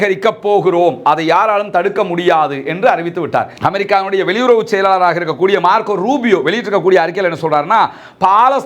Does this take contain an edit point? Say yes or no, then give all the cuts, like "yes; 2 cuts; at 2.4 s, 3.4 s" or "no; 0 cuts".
yes; 1 cut; at 3.5 s